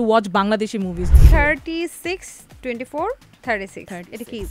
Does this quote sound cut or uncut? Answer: cut